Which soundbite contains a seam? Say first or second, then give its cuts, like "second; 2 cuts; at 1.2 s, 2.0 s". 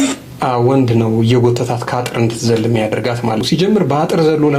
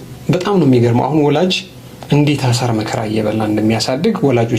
first; 1 cut; at 3.4 s